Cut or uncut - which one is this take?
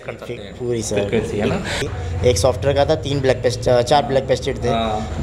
cut